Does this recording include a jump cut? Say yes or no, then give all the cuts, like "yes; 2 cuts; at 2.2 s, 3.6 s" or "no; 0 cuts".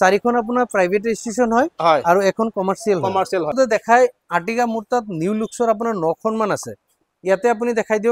yes; 1 cut; at 3.5 s